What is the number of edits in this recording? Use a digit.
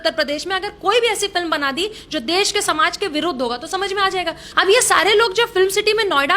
1